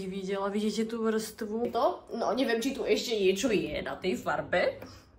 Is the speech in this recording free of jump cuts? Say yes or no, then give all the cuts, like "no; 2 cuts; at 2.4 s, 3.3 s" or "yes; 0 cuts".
no; 1 cut; at 1.7 s